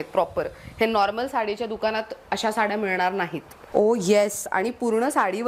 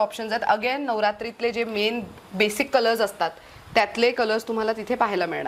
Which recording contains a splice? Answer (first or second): first